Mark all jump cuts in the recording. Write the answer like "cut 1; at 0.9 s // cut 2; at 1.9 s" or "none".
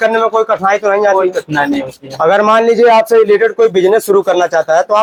none